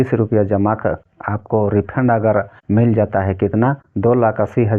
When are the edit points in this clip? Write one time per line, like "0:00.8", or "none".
0:01.1
0:02.6
0:03.9